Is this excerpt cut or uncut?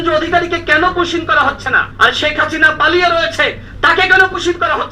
cut